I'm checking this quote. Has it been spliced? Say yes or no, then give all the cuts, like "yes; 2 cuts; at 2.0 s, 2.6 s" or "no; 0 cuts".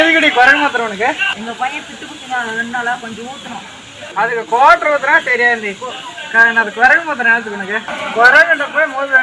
yes; 3 cuts; at 1.3 s, 3.9 s, 7.9 s